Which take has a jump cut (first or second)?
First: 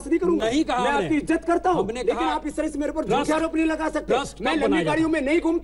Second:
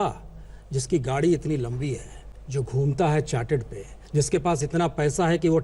second